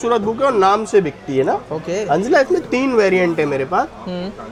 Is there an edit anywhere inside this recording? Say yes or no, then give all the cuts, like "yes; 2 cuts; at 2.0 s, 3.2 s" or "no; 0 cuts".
no; 0 cuts